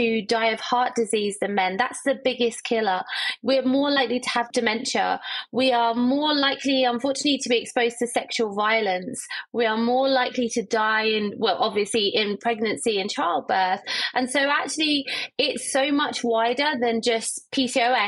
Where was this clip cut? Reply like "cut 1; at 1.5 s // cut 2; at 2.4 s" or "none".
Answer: none